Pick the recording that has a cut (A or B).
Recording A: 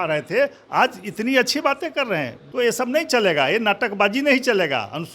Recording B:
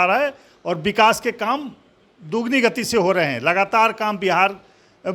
A